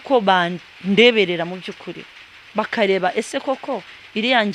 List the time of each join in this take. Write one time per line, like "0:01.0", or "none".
none

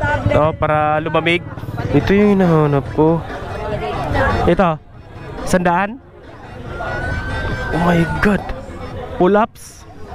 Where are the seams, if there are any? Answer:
0:01.9
0:04.1

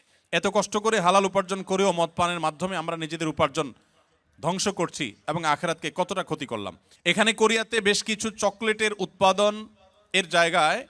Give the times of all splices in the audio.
0:06.9

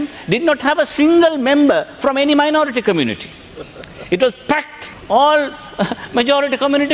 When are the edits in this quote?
0:04.9

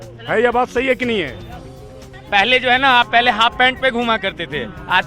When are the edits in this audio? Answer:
0:02.1

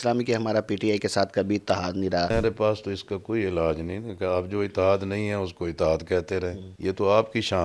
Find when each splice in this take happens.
0:02.3
0:06.6

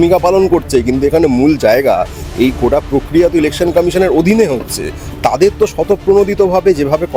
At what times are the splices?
none

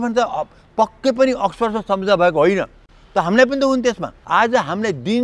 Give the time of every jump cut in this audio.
0:04.1

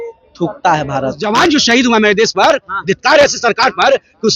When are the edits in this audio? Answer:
0:01.2

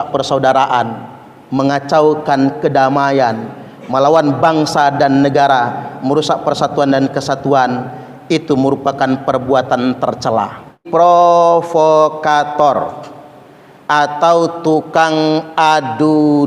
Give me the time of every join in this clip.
0:10.8

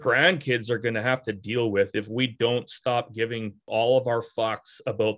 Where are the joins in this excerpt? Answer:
none

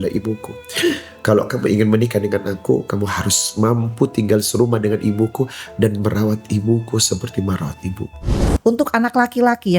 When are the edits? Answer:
0:08.4

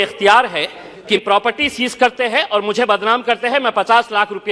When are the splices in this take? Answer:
0:01.2

